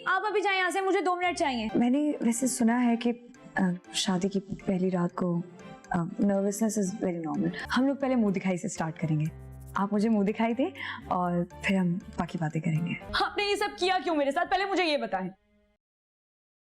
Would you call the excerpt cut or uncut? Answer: cut